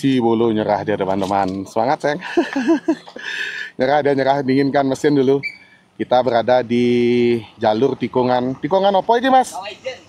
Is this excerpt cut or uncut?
uncut